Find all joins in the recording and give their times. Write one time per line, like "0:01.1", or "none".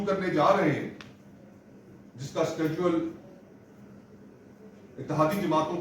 none